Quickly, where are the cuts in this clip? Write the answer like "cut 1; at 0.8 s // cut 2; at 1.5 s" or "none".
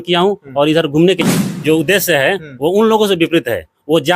cut 1; at 1.2 s